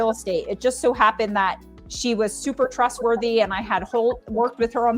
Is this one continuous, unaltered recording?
yes; 0 cuts

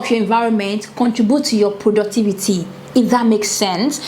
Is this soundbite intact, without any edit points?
yes; 0 cuts

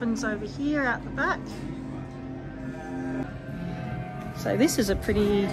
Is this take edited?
no; 0 cuts

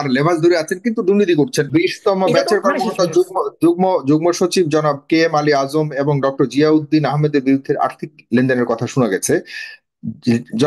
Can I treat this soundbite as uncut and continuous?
no; 1 cut; at 1.7 s

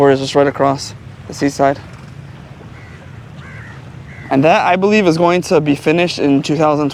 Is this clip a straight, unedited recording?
yes; 0 cuts

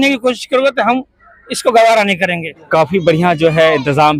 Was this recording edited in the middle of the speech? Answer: no; 0 cuts

